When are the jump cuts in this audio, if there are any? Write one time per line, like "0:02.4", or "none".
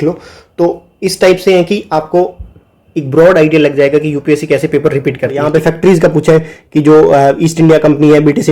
0:05.4